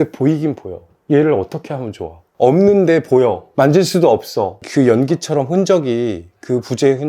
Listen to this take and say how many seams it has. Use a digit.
1